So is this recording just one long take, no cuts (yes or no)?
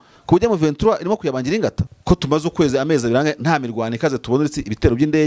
no